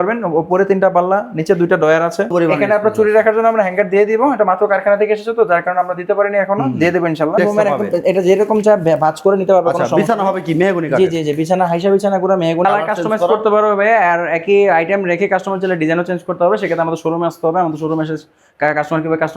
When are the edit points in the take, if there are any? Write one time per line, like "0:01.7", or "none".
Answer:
0:02.3
0:07.4
0:12.6